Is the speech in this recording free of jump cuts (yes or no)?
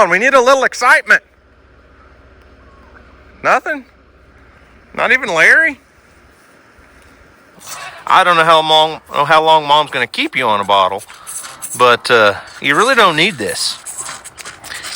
no